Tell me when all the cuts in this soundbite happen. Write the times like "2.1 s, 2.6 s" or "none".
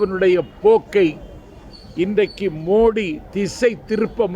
none